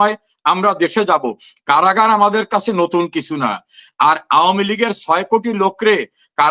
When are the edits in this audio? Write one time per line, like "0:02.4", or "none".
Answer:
none